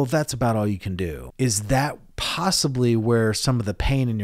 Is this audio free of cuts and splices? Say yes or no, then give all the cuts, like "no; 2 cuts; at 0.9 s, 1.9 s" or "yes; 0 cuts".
no; 1 cut; at 1.2 s